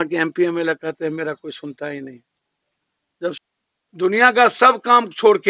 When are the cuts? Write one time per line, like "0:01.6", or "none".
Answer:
0:03.4